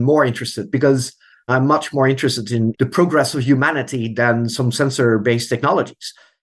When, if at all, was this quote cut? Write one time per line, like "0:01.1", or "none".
0:01.5